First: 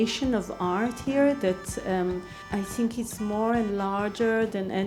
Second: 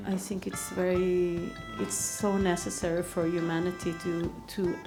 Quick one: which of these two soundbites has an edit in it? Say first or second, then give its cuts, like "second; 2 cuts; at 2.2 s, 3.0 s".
first; 1 cut; at 2.3 s